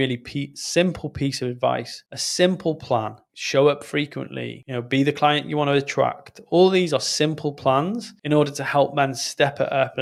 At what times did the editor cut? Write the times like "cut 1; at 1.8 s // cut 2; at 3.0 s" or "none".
none

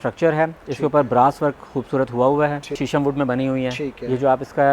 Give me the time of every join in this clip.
cut 1; at 2.8 s

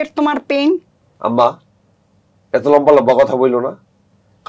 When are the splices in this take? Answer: cut 1; at 1.1 s

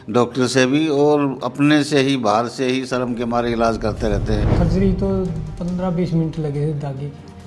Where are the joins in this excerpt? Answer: cut 1; at 4.5 s

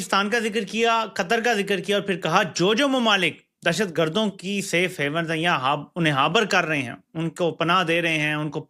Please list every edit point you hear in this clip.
none

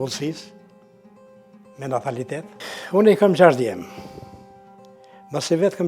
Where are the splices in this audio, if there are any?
none

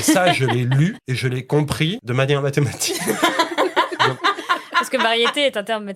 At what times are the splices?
cut 1; at 1.1 s // cut 2; at 2.0 s

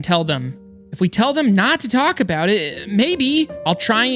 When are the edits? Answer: none

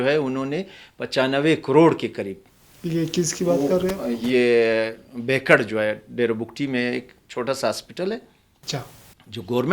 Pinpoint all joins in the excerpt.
none

